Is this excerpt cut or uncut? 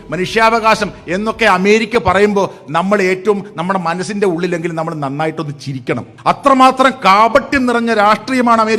cut